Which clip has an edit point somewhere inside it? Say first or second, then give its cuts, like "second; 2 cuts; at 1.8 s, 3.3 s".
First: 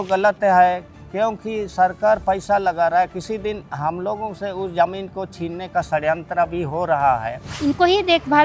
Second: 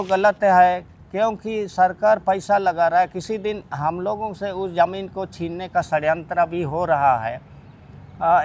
first; 1 cut; at 7.5 s